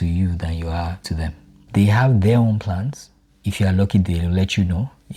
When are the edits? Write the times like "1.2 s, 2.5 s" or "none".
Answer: 1.7 s, 3.3 s

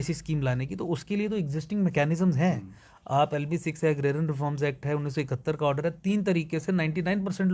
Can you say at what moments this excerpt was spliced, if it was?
none

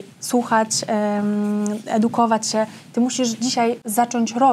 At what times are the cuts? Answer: none

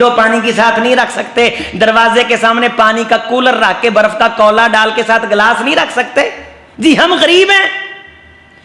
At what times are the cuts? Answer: none

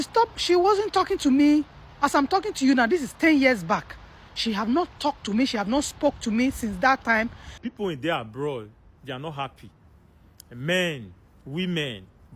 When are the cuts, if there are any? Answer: 7.6 s

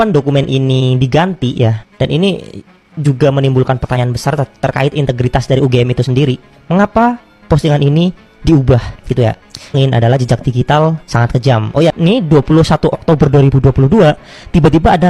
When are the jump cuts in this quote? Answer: 9.8 s, 11.9 s

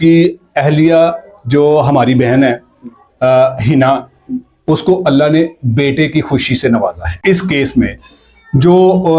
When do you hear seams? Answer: 7.1 s

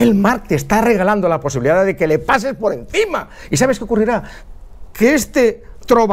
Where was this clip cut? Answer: none

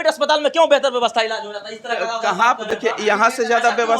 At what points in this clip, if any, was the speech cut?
none

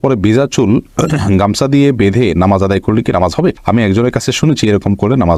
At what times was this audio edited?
none

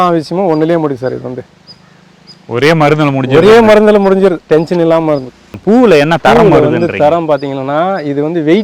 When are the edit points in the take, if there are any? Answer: 5.5 s

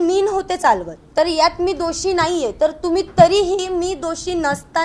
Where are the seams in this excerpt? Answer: 1.0 s

